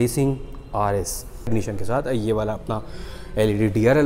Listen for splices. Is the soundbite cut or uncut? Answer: cut